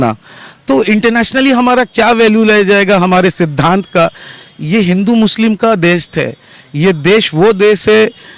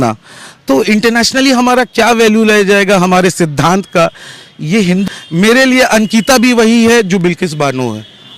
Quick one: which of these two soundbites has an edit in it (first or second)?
second